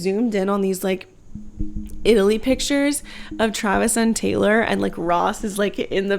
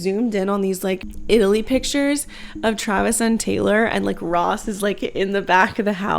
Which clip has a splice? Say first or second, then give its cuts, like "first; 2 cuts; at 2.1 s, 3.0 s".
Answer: second; 1 cut; at 1.1 s